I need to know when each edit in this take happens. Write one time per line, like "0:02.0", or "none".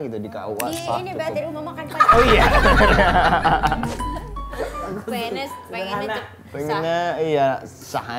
none